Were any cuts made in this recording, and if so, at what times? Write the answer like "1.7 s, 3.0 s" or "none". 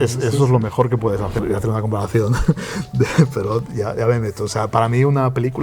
1.4 s